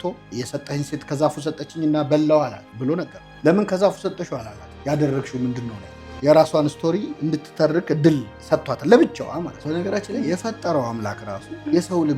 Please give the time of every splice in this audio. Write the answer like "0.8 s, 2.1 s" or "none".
9.6 s